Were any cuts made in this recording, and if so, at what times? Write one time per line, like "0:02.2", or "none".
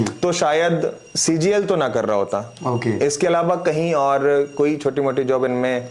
none